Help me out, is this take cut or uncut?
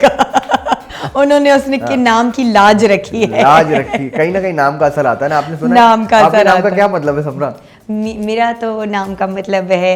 uncut